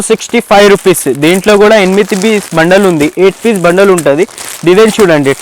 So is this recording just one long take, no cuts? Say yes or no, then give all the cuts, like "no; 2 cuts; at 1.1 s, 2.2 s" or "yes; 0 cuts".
yes; 0 cuts